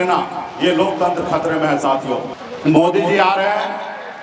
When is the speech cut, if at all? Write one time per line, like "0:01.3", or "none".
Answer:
0:02.3